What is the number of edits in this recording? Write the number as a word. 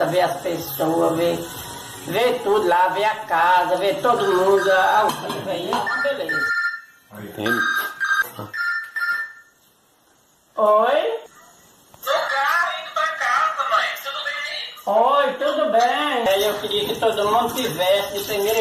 one